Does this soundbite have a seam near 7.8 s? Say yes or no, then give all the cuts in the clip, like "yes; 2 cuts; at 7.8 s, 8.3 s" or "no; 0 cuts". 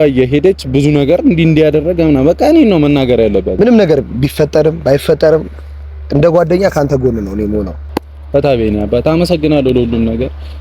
yes; 2 cuts; at 3.5 s, 7.8 s